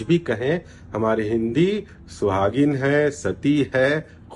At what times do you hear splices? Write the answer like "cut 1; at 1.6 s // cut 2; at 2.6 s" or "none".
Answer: none